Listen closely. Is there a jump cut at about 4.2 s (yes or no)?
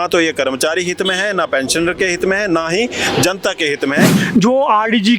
yes